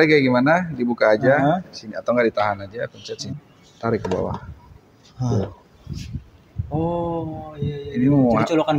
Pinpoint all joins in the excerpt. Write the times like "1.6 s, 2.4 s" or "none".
3.3 s